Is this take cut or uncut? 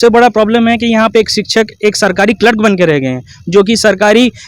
uncut